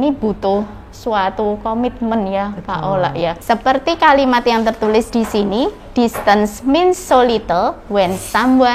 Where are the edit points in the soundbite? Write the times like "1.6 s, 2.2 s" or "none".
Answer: 3.4 s